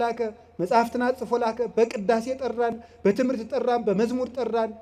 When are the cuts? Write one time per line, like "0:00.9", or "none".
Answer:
none